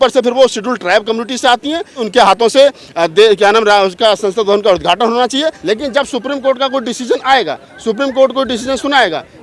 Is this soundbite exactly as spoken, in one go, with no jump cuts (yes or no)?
no